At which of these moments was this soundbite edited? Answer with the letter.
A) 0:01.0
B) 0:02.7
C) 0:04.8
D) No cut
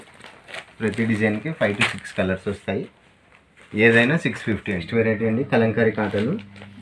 C